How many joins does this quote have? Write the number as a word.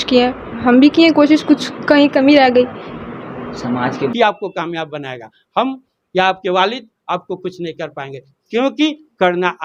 one